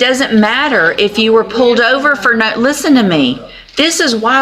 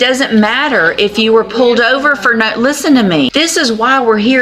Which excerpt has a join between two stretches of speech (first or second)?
second